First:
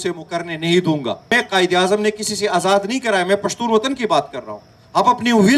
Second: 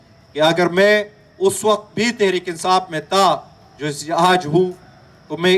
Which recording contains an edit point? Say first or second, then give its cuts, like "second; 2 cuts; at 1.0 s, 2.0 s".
first; 1 cut; at 1.3 s